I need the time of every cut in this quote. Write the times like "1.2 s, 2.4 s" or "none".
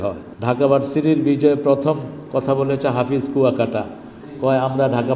none